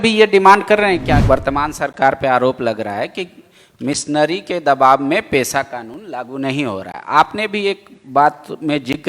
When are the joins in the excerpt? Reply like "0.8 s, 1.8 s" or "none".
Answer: 1.0 s

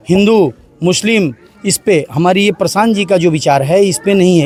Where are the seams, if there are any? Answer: none

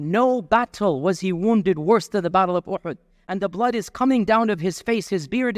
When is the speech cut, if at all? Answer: none

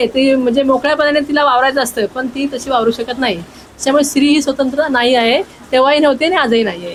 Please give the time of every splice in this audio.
none

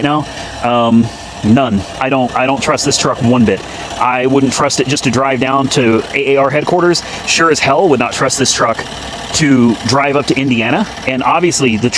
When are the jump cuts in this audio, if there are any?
none

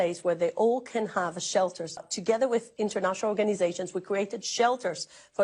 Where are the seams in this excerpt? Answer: 2.0 s

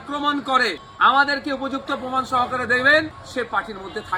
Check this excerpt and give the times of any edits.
0.9 s, 3.2 s

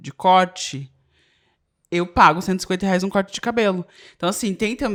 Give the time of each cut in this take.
none

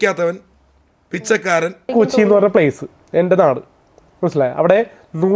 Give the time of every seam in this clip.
1.9 s

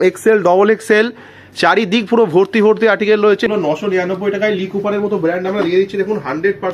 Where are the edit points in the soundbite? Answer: 3.5 s

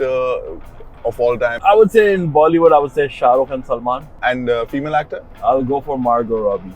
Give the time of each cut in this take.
1.6 s, 4.2 s, 5.2 s

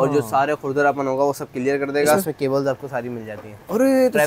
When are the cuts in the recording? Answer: 2.2 s

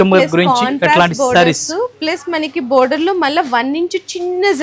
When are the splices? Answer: none

